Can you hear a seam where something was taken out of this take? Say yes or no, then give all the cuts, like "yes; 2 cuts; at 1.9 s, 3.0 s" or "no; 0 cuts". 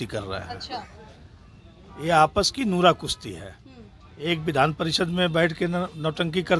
no; 0 cuts